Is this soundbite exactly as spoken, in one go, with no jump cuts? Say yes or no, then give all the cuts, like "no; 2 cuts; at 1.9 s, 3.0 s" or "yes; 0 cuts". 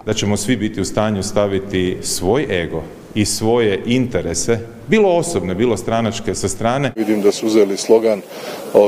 no; 1 cut; at 6.9 s